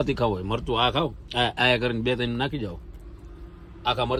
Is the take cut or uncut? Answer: uncut